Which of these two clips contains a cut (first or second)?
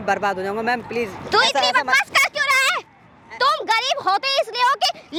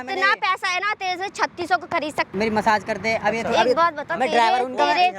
second